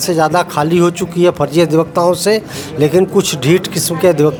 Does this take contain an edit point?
no; 0 cuts

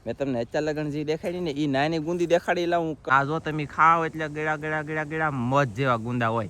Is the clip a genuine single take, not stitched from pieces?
no; 1 cut; at 3.1 s

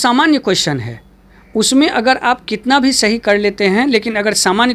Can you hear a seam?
no; 0 cuts

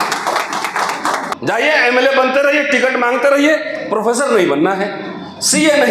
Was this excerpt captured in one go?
no; 1 cut; at 1.3 s

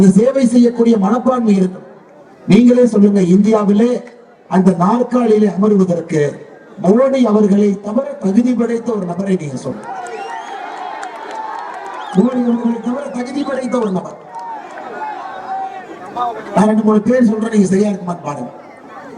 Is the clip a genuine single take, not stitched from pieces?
yes; 0 cuts

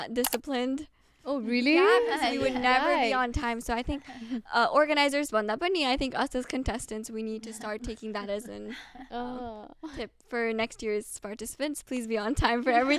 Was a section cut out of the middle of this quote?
no; 0 cuts

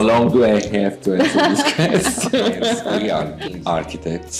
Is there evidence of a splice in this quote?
yes; 1 cut; at 3.0 s

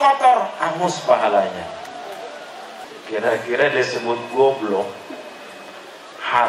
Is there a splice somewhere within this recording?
yes; 1 cut; at 2.8 s

